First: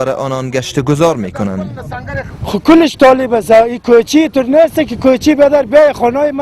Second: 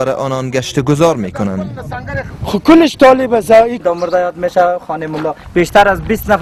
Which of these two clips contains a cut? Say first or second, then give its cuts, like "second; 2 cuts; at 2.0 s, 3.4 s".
first; 1 cut; at 3.8 s